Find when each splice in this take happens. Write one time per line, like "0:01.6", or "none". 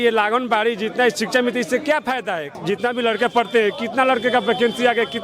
0:02.5